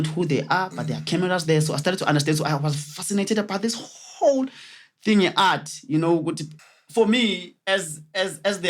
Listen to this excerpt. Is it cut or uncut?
cut